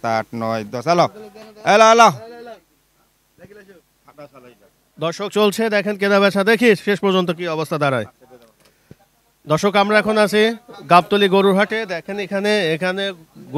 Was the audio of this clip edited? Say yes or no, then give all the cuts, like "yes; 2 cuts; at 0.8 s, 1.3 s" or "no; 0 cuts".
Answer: no; 0 cuts